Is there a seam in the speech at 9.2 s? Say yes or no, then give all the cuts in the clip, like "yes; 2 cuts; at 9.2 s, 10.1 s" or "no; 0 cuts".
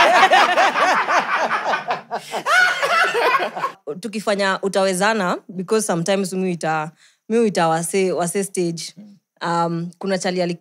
no; 1 cut; at 3.8 s